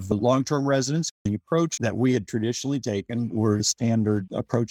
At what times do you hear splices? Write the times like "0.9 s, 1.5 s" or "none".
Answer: 1.2 s